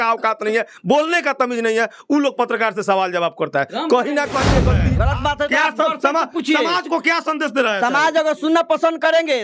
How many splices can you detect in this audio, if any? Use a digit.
1